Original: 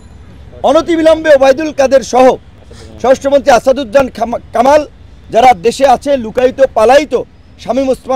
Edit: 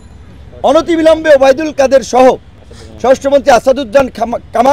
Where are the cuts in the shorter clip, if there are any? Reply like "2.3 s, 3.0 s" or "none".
none